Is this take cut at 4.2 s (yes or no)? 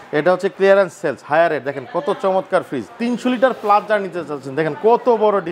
no